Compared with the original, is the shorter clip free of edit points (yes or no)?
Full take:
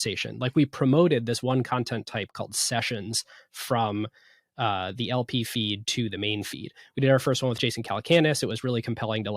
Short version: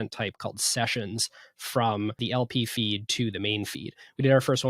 no